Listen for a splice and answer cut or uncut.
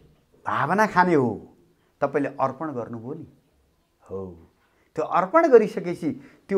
uncut